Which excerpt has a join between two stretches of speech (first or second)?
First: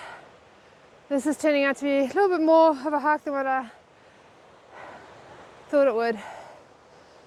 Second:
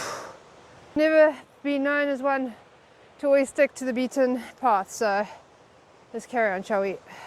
second